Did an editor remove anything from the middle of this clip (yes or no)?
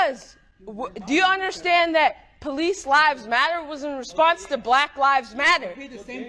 no